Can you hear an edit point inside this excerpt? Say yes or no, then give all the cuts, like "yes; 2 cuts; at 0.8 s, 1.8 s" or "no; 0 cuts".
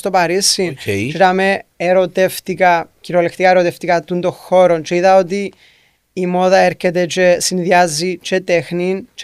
no; 0 cuts